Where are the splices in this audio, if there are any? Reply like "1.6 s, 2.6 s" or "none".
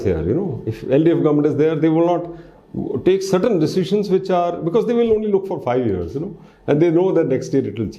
none